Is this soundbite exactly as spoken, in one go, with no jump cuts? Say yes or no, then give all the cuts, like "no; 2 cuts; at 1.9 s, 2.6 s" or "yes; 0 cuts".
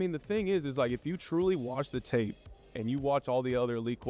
yes; 0 cuts